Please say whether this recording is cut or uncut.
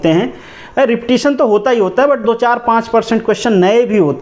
uncut